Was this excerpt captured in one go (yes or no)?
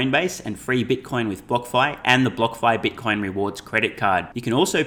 yes